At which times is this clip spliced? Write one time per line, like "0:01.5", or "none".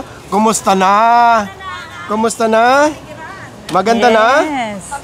none